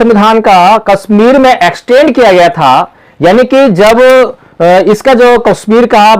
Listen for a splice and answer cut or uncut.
uncut